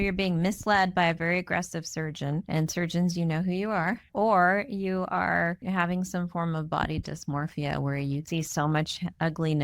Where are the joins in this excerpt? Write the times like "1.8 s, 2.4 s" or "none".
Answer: 2.5 s, 4.1 s, 5.6 s, 8.2 s